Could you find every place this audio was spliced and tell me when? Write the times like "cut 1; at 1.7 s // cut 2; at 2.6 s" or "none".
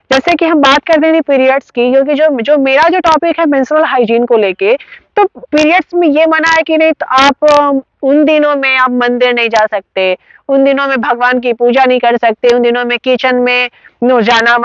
none